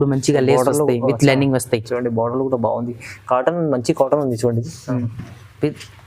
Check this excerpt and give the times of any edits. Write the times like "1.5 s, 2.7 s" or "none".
none